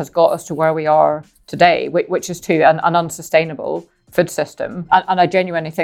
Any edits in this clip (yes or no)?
no